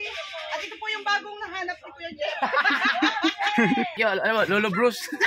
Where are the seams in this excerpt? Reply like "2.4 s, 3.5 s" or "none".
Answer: 3.9 s